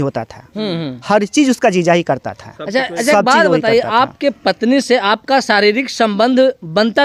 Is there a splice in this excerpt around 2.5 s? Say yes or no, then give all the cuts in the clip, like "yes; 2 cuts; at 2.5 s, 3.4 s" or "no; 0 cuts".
no; 0 cuts